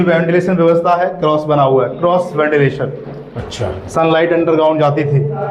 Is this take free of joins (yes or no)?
yes